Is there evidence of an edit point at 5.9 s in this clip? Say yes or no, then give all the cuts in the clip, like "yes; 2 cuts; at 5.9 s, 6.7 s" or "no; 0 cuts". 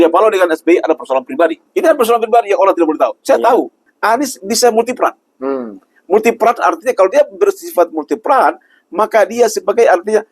no; 2 cuts; at 1.6 s, 3.8 s